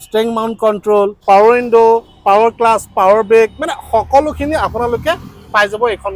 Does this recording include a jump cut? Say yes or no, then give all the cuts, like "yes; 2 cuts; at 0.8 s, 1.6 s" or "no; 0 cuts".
no; 0 cuts